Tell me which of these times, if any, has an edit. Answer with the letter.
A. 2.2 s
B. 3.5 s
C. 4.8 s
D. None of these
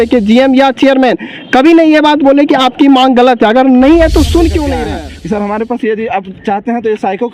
C